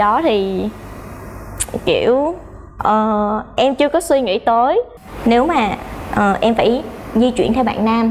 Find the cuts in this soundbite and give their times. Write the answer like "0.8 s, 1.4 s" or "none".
5.0 s